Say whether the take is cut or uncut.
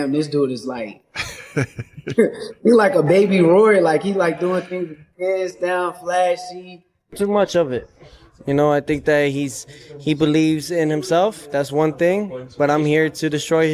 cut